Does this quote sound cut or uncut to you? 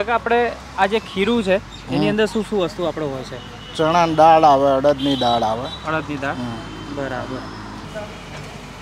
cut